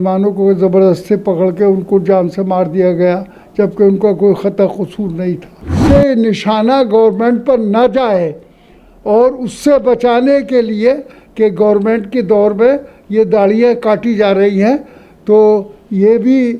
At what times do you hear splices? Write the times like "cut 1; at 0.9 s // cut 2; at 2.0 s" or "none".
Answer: cut 1; at 5.8 s